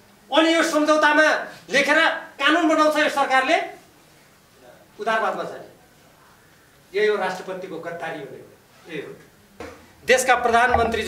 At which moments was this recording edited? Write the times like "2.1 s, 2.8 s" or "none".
9.7 s